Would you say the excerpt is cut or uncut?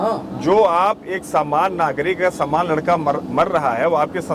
uncut